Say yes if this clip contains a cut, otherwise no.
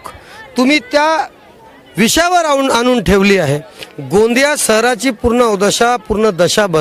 no